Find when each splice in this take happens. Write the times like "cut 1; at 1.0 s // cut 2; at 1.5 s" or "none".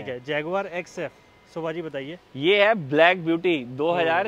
none